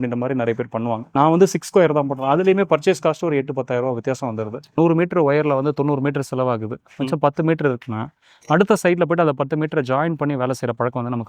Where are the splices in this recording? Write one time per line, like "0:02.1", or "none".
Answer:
0:01.1
0:04.7